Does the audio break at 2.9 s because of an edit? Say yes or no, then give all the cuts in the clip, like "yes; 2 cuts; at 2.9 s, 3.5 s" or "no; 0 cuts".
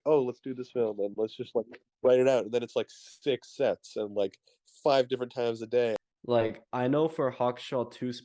no; 1 cut; at 6.1 s